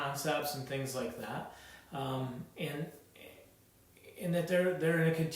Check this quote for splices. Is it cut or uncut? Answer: uncut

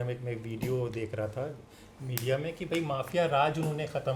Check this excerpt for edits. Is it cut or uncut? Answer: uncut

